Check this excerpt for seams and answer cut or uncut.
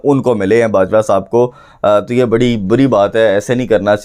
uncut